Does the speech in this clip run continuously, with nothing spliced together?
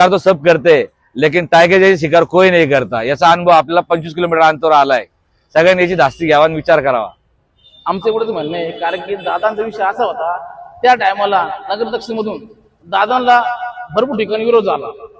yes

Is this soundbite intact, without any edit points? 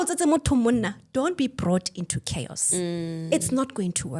yes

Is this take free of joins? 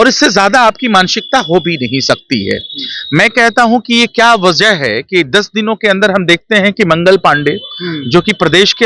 yes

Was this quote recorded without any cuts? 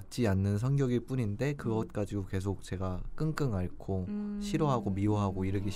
yes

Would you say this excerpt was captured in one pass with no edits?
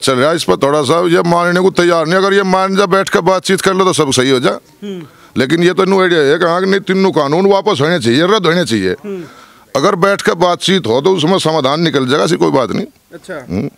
yes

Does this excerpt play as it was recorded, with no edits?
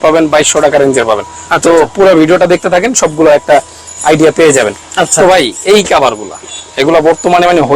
yes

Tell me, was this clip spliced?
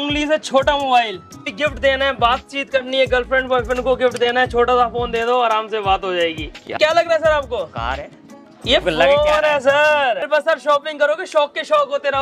yes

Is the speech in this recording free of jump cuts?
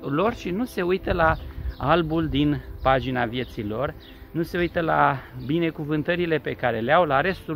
yes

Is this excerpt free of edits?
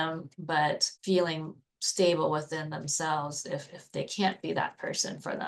no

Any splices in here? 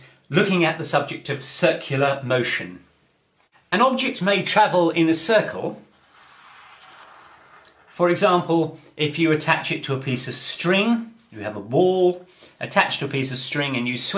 no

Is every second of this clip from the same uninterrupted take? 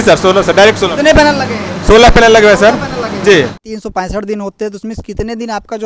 no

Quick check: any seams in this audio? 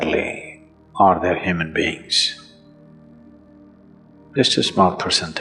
no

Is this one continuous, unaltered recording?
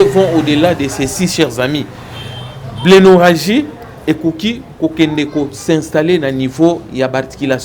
yes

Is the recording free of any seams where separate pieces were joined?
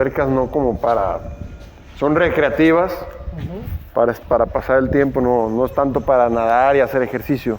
yes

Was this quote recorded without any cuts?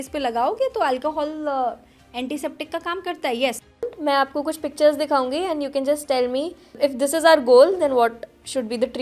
no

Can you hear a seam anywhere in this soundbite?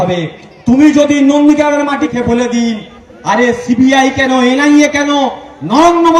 yes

